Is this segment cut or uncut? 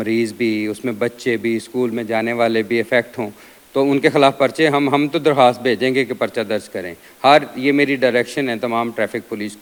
uncut